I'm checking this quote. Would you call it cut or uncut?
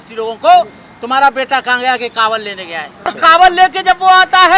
cut